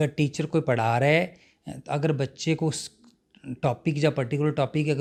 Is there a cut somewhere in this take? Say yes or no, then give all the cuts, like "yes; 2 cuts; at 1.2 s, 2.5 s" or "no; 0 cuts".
no; 0 cuts